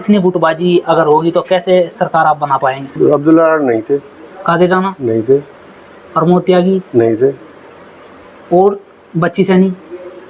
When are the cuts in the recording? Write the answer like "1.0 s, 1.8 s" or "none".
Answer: 2.9 s